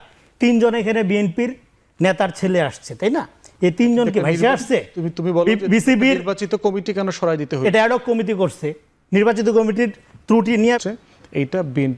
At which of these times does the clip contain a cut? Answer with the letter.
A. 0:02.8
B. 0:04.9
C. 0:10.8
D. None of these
C